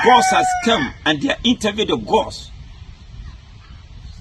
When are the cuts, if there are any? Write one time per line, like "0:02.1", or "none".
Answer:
none